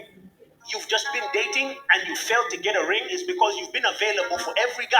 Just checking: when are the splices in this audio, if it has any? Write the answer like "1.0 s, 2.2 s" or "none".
none